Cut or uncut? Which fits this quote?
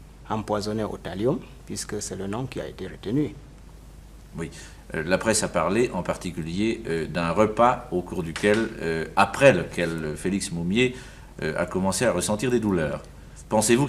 uncut